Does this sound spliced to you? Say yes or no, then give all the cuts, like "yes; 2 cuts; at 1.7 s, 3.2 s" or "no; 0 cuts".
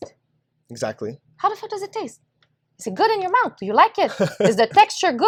no; 0 cuts